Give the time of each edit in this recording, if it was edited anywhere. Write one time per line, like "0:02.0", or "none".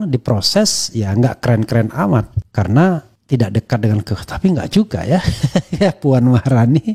0:02.4
0:03.1